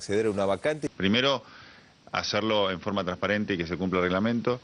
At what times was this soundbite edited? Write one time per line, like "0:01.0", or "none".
0:01.0